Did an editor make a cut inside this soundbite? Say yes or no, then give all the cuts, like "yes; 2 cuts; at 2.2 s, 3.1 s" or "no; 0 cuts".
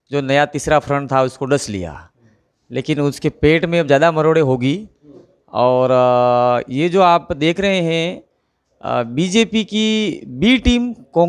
no; 0 cuts